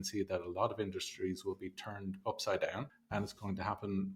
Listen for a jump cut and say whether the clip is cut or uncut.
cut